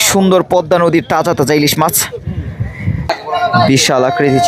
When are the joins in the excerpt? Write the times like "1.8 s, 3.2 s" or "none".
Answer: 3.1 s